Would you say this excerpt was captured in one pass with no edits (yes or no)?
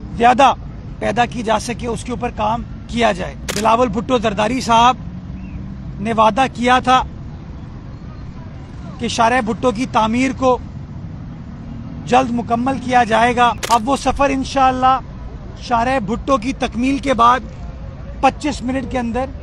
no